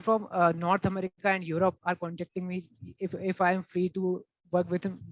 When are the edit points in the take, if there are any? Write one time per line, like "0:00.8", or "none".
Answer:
none

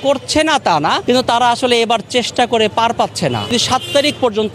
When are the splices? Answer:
0:01.0
0:03.5

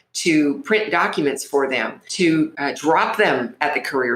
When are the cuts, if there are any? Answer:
0:02.0
0:02.6

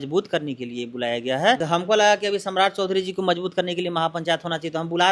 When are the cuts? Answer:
0:01.6

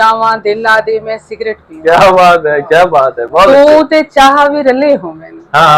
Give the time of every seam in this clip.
none

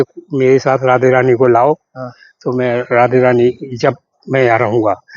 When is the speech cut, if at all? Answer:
none

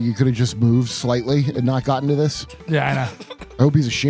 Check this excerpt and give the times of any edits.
none

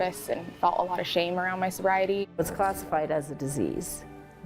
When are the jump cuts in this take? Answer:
0:02.4

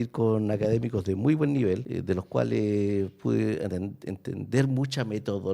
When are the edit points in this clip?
0:01.9

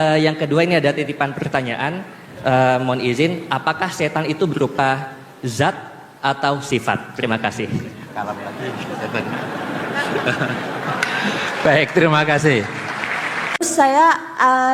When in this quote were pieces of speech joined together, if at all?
0:13.5

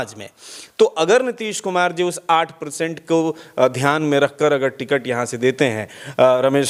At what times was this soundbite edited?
none

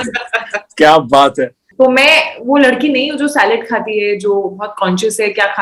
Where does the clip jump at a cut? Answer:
0:01.7

